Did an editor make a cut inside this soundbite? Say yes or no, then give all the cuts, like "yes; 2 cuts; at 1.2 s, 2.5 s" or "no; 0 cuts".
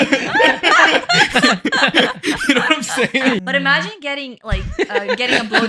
yes; 1 cut; at 3.4 s